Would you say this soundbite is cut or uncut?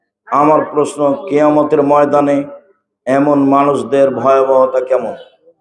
uncut